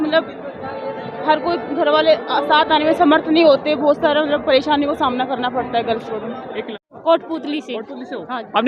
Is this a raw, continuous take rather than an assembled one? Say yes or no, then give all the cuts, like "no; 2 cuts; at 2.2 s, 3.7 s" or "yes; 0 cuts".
no; 1 cut; at 6.8 s